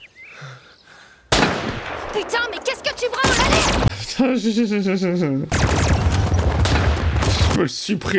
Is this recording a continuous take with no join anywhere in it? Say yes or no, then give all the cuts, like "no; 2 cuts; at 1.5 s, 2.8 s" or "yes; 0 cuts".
yes; 0 cuts